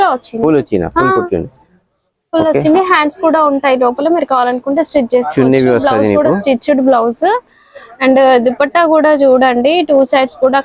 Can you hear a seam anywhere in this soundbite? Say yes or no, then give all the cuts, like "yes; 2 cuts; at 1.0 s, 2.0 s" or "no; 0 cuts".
no; 0 cuts